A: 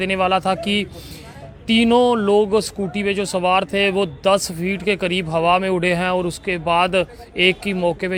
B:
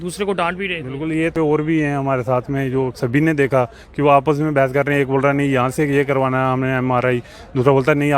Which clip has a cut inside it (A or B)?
B